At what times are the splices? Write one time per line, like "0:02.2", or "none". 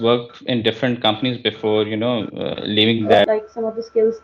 0:03.3